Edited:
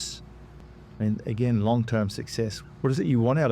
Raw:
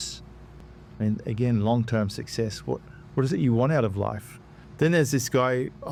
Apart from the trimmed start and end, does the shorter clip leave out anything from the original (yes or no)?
yes